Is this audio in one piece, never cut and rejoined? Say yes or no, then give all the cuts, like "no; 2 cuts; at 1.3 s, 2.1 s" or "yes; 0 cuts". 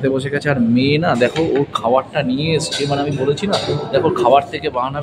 yes; 0 cuts